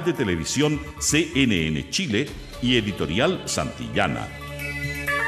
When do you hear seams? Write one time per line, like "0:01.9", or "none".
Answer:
0:04.3

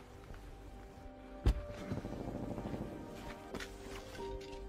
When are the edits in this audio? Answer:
0:03.5

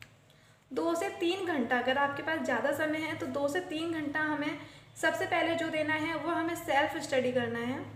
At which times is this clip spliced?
none

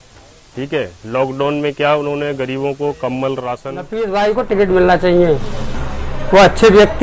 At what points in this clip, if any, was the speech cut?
0:03.9

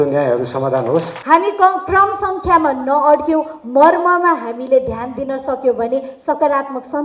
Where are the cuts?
0:01.1

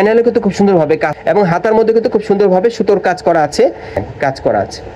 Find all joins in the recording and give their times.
0:01.1
0:04.0

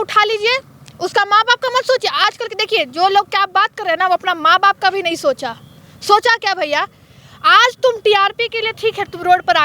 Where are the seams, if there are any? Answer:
none

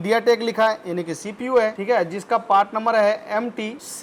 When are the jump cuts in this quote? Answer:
none

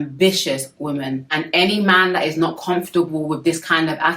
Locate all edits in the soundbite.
0:01.3

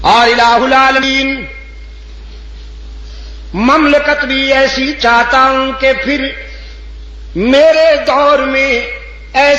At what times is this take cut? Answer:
0:01.0

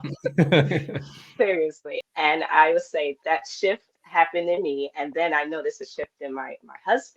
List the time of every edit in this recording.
0:01.9
0:03.9

